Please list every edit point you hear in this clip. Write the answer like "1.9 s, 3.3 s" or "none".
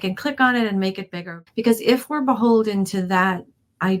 1.3 s